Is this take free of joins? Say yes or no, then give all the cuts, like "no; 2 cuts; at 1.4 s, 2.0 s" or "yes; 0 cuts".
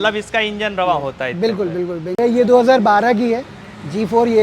no; 1 cut; at 2.2 s